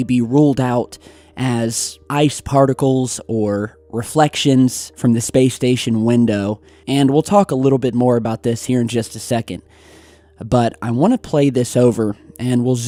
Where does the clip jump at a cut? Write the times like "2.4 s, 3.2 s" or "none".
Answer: none